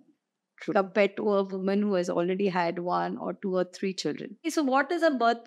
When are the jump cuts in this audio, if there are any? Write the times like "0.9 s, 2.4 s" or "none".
4.5 s